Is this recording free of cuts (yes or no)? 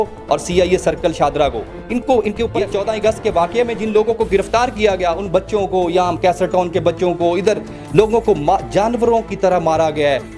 no